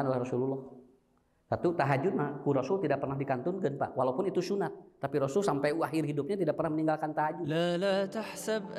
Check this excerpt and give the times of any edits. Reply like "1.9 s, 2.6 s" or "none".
7.5 s